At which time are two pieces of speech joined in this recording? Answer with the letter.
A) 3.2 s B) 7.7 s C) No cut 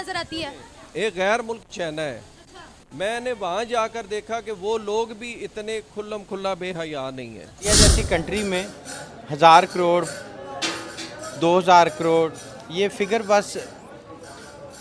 B